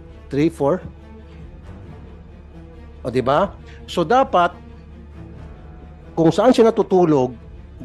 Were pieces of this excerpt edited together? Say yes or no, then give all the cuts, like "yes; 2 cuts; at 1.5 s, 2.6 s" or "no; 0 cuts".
yes; 4 cuts; at 1.1 s, 3.0 s, 4.6 s, 6.1 s